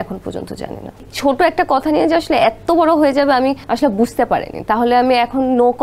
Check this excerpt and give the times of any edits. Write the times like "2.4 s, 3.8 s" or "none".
1.1 s, 3.6 s

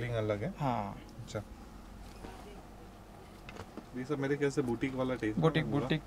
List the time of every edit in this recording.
none

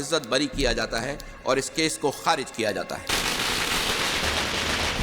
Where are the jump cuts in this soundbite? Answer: 3.1 s

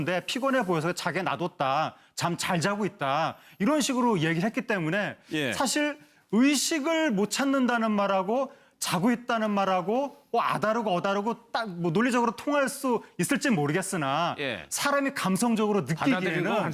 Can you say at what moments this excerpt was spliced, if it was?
12.8 s

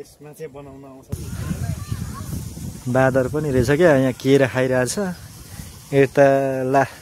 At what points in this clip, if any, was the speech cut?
1.1 s

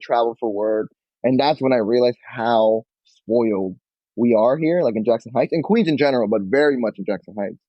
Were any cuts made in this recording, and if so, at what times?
0.9 s

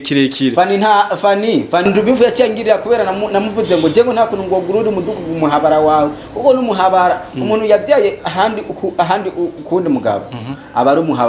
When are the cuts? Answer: 1.8 s

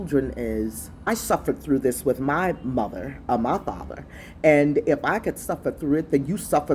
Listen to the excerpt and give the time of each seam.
1.1 s

